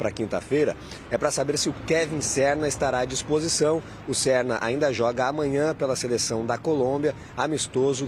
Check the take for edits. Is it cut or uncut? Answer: uncut